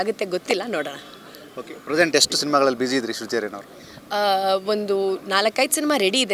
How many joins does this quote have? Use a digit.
0